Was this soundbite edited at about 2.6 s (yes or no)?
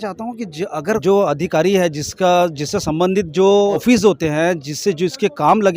no